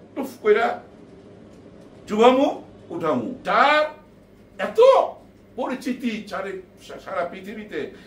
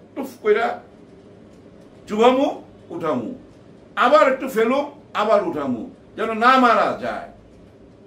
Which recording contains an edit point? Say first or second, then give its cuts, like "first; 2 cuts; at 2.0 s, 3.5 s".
first; 1 cut; at 3.4 s